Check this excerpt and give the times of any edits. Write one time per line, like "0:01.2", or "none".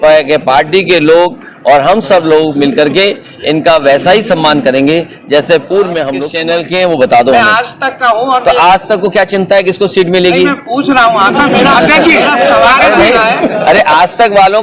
0:06.3